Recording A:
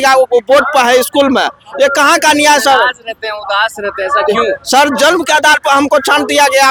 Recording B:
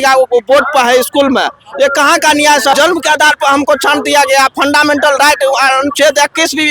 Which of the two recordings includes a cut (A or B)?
B